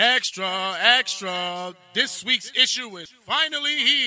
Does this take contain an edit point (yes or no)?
yes